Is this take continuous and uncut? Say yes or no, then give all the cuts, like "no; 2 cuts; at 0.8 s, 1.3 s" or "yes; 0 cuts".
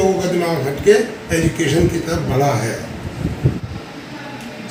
yes; 0 cuts